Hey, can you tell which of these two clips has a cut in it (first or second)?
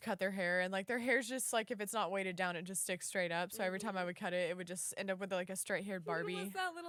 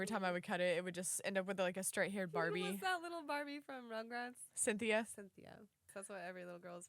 second